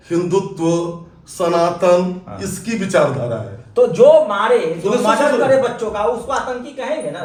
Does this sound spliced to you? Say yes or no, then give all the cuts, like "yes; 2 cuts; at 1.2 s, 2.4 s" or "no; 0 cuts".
no; 0 cuts